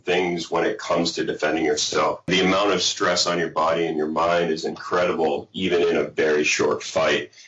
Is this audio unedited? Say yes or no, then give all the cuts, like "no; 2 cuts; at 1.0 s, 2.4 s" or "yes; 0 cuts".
no; 1 cut; at 2.3 s